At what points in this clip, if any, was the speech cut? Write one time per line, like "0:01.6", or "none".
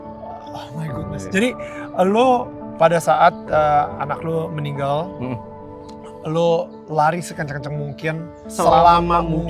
0:08.5